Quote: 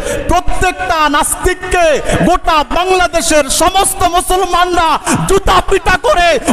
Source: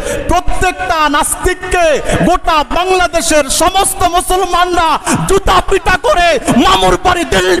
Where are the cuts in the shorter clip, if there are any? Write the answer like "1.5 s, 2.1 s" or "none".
none